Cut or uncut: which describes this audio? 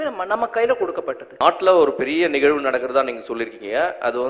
cut